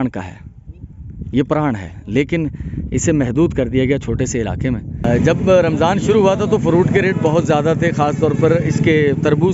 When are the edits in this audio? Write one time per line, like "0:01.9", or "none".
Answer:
0:05.0